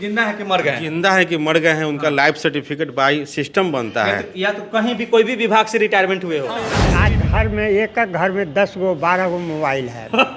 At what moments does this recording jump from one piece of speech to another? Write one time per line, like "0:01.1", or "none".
0:06.9